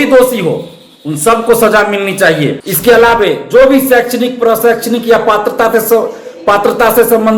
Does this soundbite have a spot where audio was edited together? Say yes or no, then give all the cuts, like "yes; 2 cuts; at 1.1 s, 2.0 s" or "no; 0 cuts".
yes; 1 cut; at 2.6 s